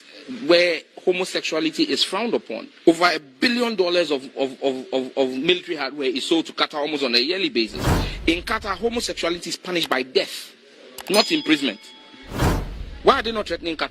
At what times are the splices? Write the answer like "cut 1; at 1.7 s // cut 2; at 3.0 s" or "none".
none